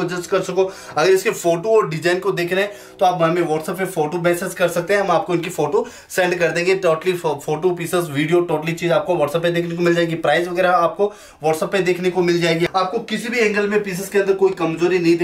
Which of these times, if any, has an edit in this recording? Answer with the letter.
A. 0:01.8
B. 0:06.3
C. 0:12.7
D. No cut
C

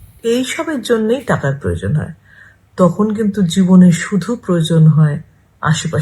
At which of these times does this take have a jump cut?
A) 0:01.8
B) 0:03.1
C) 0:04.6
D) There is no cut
C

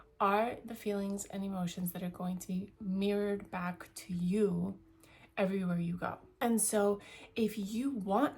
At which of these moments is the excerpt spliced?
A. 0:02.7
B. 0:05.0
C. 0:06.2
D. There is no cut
C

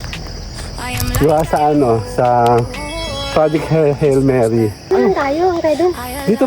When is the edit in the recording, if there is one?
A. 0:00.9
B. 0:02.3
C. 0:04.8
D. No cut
C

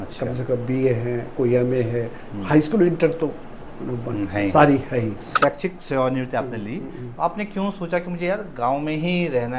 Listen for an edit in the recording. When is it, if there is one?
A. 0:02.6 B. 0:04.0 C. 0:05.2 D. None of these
C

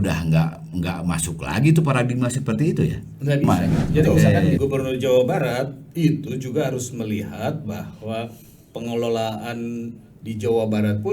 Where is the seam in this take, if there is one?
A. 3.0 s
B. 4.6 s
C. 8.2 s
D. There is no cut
B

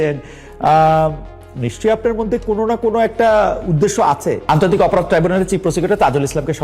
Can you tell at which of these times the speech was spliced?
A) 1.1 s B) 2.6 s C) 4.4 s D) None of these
C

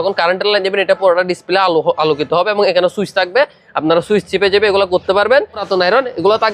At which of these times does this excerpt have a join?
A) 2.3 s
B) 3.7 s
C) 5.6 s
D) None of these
C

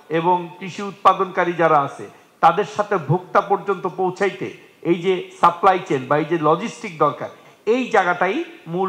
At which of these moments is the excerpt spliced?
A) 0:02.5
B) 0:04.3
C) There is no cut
C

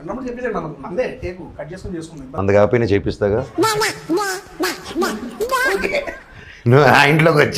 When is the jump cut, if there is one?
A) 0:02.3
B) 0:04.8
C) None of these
A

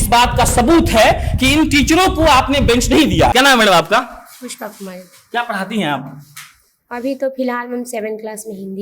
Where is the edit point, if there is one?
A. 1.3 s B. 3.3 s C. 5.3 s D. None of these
B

